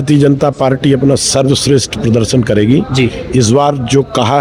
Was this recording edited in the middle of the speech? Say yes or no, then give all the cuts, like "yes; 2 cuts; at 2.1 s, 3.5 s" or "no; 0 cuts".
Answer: no; 0 cuts